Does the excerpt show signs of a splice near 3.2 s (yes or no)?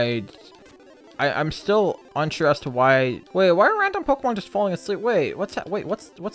yes